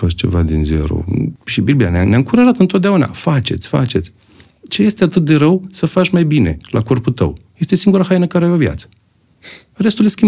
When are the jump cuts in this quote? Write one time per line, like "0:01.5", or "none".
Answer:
0:01.4